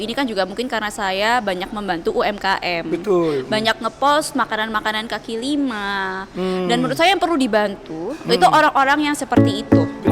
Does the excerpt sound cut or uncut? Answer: uncut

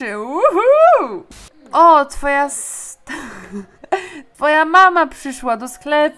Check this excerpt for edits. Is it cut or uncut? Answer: cut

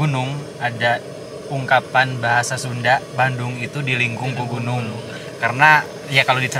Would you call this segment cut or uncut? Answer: uncut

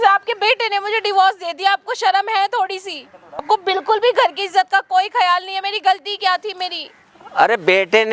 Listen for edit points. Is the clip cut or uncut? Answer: uncut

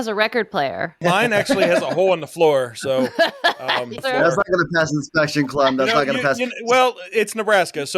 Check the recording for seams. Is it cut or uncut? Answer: cut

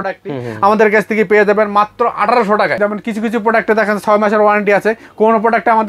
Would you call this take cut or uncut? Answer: cut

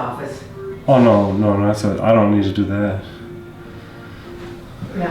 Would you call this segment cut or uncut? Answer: uncut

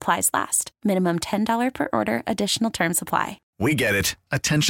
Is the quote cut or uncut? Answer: cut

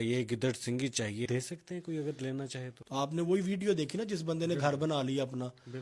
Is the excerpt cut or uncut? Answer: cut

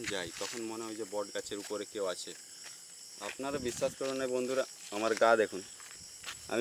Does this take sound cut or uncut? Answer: uncut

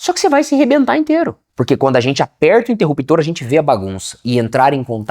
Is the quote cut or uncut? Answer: cut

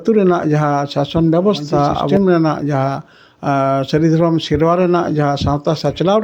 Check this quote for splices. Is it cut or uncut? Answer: cut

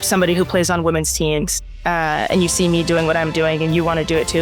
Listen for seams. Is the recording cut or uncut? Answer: uncut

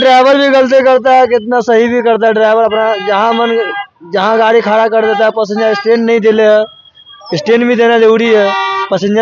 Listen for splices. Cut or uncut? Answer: uncut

